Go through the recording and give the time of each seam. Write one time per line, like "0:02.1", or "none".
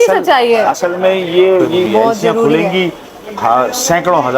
0:01.9